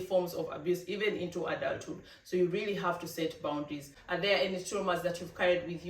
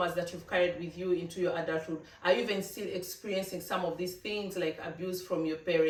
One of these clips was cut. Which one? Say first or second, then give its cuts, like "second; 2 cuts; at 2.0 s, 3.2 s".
first; 1 cut; at 4.0 s